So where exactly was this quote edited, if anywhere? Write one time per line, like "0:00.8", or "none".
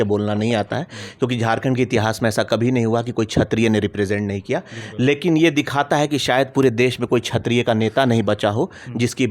none